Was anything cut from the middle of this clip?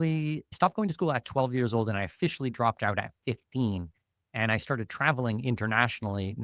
no; 0 cuts

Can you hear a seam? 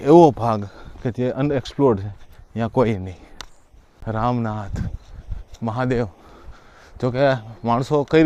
no; 0 cuts

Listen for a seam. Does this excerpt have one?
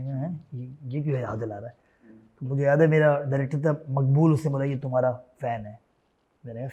no; 0 cuts

